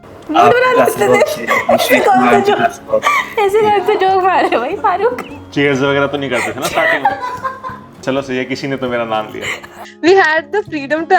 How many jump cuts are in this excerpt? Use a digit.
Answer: 2